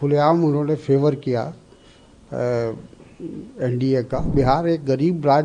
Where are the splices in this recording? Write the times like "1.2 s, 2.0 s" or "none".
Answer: 4.3 s

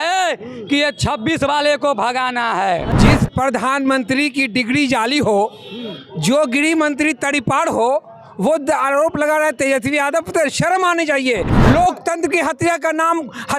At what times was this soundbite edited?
2.9 s, 11.5 s

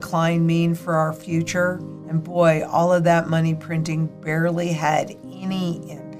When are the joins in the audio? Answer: 1.9 s

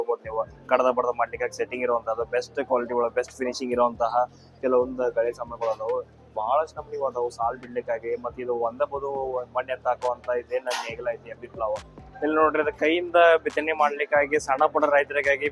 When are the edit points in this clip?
12.0 s

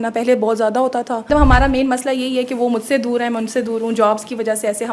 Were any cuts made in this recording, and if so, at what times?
1.3 s

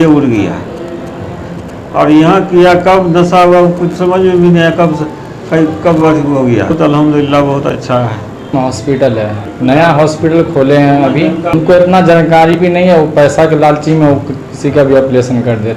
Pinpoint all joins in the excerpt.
6.7 s, 8.5 s

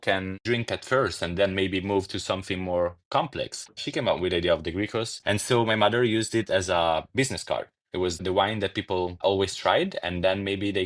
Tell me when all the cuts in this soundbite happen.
3.8 s, 5.1 s, 8.2 s

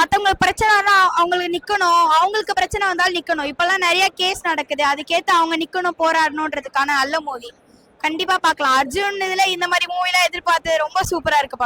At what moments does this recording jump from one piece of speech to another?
none

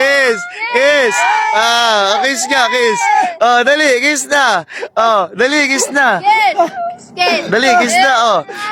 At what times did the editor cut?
none

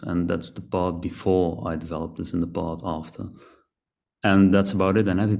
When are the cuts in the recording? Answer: none

